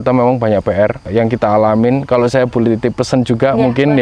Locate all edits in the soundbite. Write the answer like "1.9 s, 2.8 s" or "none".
1.0 s